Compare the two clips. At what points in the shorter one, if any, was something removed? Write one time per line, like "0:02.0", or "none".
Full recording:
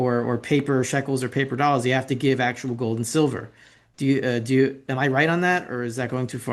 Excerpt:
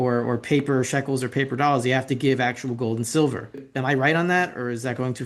0:03.7